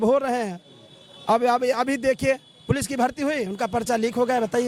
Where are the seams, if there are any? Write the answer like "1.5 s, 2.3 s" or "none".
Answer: none